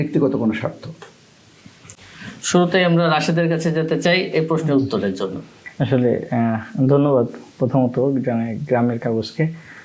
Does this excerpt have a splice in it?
no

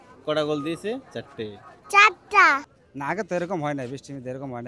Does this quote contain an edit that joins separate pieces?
yes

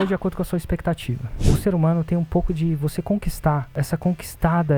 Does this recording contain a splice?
yes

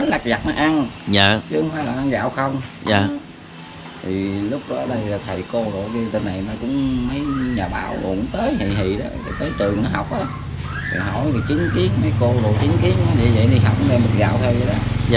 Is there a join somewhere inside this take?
no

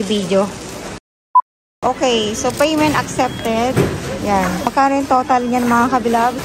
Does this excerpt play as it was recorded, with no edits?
yes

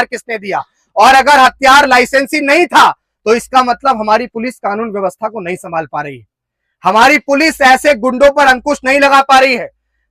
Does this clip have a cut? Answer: no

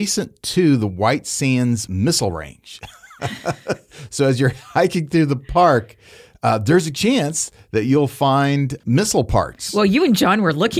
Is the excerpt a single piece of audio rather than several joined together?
yes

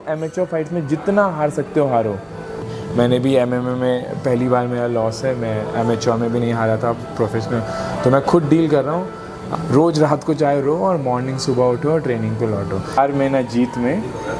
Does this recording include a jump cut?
yes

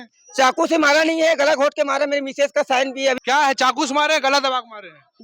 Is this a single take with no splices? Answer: no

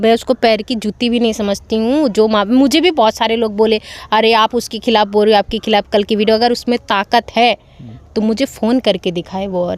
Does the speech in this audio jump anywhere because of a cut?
no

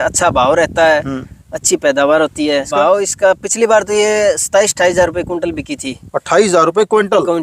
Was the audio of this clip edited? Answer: yes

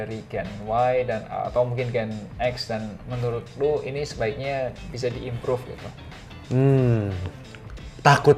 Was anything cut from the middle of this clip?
no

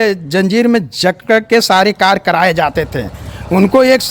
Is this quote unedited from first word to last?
yes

